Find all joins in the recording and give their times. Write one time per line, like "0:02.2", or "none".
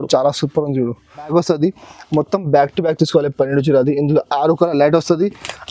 0:01.3